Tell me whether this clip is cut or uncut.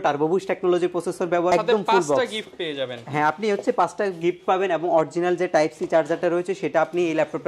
cut